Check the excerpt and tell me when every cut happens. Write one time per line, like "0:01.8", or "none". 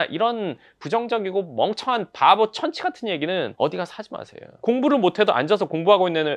0:03.5
0:04.4